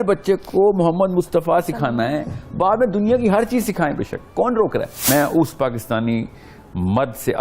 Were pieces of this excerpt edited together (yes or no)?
yes